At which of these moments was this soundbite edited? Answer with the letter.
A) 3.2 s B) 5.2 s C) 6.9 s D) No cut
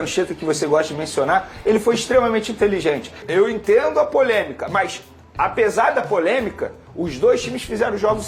A